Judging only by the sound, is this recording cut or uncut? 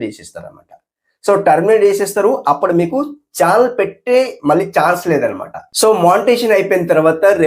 cut